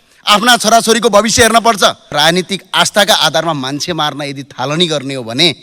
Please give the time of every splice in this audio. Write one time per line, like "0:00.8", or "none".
0:02.1